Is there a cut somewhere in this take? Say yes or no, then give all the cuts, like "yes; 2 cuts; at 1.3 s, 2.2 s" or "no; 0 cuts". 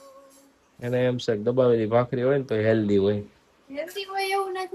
no; 0 cuts